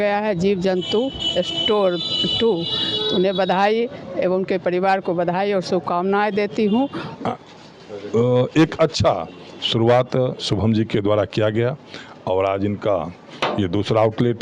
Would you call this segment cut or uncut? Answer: cut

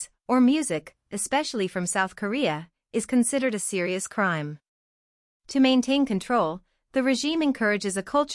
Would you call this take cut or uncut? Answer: cut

